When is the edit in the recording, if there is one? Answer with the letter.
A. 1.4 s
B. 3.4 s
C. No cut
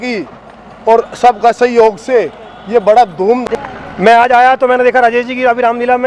B